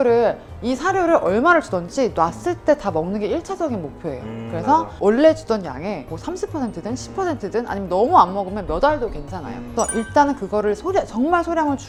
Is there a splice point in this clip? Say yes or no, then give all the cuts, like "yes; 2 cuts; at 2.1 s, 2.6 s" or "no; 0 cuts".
no; 0 cuts